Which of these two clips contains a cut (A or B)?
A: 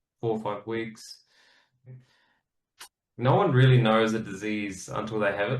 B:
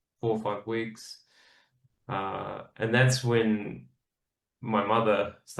A